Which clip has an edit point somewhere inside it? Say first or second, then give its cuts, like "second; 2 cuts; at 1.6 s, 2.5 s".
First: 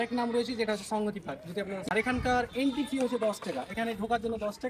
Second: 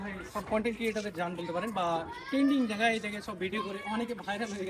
first; 1 cut; at 1.9 s